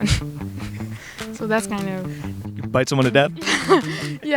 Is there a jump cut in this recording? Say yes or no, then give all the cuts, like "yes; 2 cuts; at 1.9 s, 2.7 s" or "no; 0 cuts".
yes; 1 cut; at 2.5 s